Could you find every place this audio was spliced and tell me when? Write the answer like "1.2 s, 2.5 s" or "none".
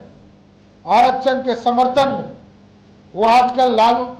none